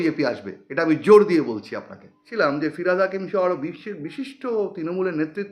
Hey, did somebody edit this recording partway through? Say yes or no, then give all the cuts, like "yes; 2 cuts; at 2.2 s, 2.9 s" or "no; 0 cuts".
yes; 1 cut; at 2.2 s